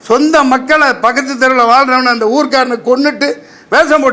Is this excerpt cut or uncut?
uncut